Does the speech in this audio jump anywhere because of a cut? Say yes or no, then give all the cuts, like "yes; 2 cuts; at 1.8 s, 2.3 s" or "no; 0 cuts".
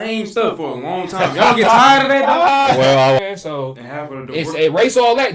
yes; 1 cut; at 3.2 s